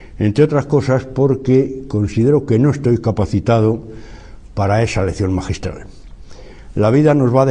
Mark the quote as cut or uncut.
cut